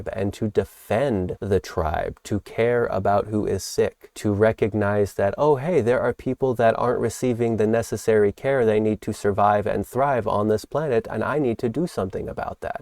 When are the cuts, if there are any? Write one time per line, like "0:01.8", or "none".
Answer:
0:01.4
0:04.1